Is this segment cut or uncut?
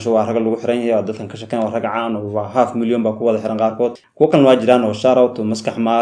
uncut